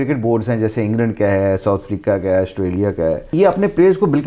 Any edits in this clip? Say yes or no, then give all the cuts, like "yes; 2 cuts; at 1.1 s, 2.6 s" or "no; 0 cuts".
yes; 1 cut; at 3.3 s